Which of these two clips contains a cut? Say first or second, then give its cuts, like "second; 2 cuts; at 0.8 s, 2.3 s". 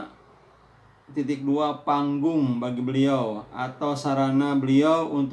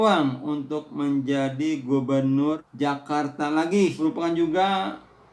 second; 2 cuts; at 2.7 s, 4.0 s